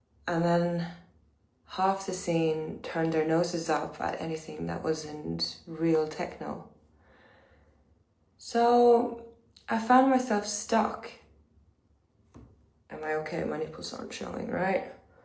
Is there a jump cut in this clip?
yes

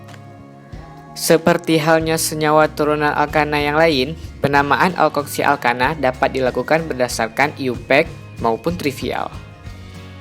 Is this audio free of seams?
no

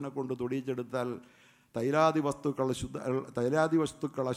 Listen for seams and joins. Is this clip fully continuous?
yes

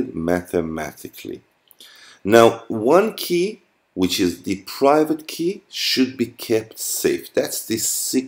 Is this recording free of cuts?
yes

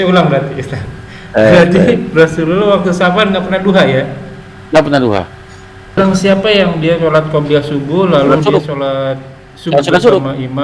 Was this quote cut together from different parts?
yes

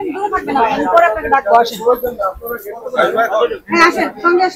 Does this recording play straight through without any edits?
yes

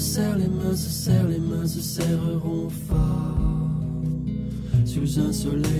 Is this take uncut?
yes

